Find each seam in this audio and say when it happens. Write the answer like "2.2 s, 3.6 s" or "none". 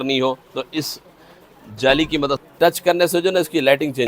2.4 s